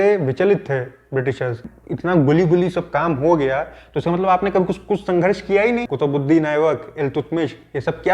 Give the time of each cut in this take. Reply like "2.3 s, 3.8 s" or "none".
1.6 s, 5.9 s